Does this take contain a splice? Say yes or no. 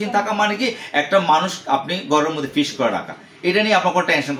no